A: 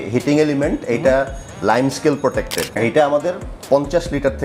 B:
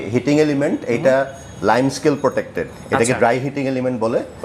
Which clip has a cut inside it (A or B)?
A